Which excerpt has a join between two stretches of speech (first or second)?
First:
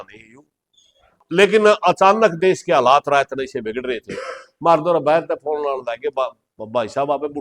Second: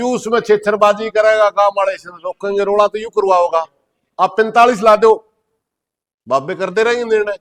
first